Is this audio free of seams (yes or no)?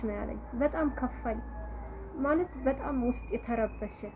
yes